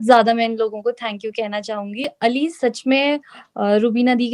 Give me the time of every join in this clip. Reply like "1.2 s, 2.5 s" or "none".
2.1 s